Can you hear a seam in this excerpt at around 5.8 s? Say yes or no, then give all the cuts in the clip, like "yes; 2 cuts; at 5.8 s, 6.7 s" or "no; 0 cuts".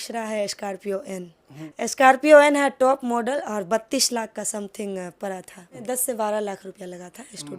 yes; 2 cuts; at 1.6 s, 5.8 s